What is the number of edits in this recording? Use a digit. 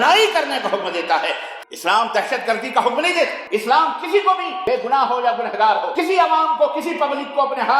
4